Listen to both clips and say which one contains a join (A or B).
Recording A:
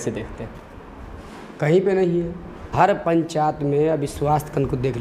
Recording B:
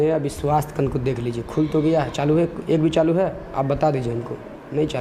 A